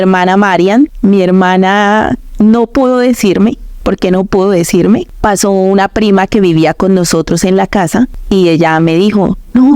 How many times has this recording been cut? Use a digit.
3